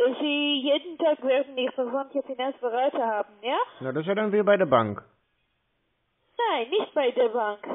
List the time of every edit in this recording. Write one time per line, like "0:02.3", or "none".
none